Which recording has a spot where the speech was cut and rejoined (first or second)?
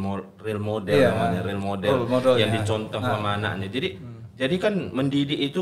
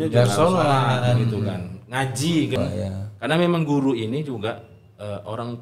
second